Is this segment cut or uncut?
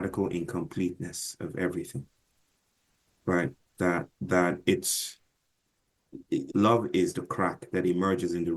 cut